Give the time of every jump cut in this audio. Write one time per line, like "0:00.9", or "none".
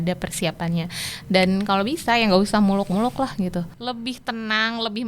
0:03.7